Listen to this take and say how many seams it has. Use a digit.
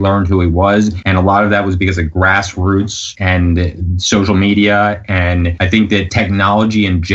3